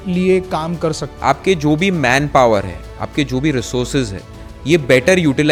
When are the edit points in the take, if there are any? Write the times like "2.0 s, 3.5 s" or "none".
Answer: none